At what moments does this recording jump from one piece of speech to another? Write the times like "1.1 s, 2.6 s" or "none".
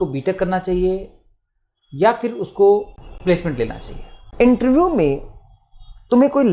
3.0 s, 4.2 s

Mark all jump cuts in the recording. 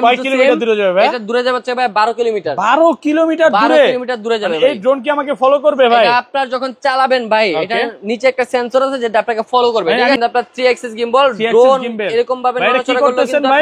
10.2 s

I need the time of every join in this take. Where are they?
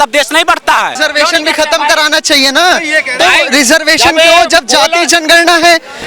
1.0 s

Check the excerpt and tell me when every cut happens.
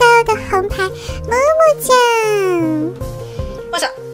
none

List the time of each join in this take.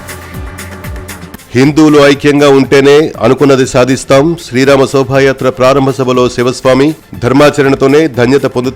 0.9 s

